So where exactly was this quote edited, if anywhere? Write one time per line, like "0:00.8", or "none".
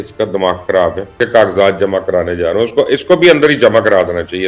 0:01.1